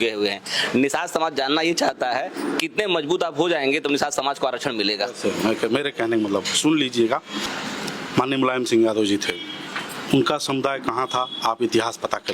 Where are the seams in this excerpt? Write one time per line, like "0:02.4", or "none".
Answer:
0:07.4